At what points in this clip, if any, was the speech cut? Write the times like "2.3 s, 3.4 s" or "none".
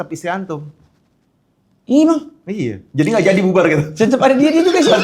none